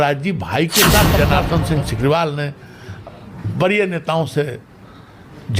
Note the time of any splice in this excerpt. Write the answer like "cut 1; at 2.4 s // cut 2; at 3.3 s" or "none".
cut 1; at 1.2 s